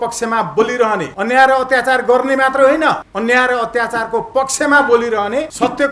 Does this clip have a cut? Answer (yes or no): no